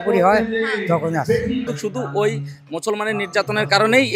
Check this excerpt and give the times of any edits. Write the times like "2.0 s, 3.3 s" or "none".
1.7 s